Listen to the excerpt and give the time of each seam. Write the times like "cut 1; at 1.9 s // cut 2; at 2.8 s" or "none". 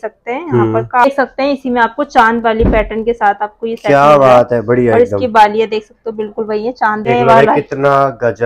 cut 1; at 1.1 s // cut 2; at 7.1 s

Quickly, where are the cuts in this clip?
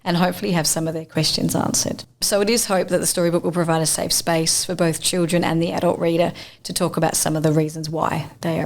cut 1; at 2.1 s

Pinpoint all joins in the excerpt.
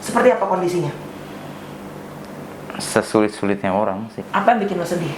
cut 1; at 4.2 s

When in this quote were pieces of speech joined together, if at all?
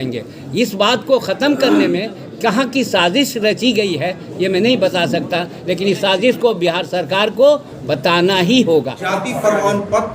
cut 1; at 9.0 s

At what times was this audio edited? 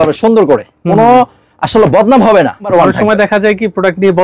cut 1; at 2.7 s

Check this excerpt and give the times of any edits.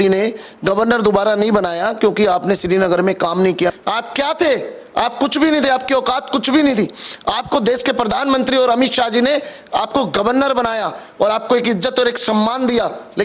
cut 1; at 3.7 s

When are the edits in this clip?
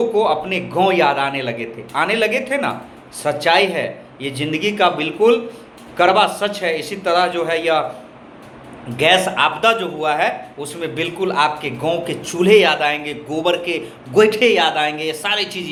none

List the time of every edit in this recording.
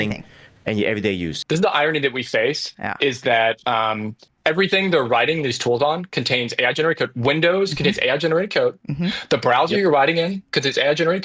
cut 1; at 1.3 s

